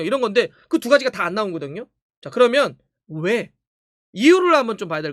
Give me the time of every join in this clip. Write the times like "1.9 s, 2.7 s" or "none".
none